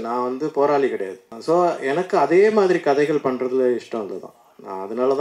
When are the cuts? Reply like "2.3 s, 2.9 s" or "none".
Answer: 1.3 s